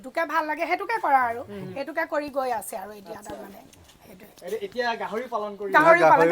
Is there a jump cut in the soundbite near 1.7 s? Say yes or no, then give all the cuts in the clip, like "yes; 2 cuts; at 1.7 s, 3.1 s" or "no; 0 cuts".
no; 0 cuts